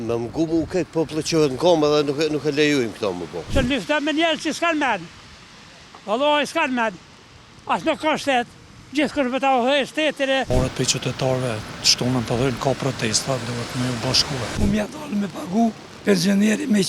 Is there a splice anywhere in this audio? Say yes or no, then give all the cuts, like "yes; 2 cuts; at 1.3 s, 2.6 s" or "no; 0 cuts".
yes; 3 cuts; at 3.4 s, 10.5 s, 14.5 s